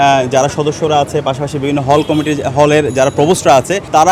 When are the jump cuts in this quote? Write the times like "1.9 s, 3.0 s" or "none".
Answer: none